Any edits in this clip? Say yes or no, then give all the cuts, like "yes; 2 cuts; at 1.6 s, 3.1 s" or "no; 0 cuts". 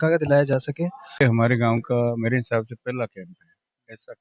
yes; 1 cut; at 1.2 s